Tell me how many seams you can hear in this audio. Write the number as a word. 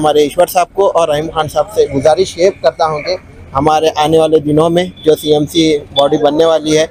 zero